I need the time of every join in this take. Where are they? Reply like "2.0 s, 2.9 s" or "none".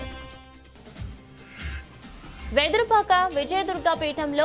2.5 s